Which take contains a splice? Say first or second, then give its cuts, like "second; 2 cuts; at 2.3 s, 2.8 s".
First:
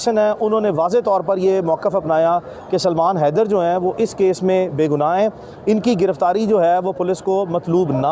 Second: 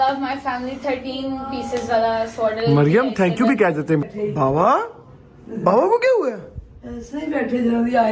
second; 1 cut; at 4.0 s